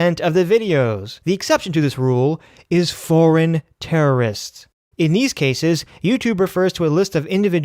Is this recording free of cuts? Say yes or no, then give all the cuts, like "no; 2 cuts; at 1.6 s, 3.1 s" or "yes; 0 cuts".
no; 1 cut; at 1.1 s